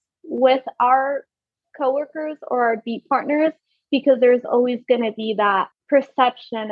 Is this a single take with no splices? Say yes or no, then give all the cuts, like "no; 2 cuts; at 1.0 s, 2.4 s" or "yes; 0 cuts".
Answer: no; 1 cut; at 5.8 s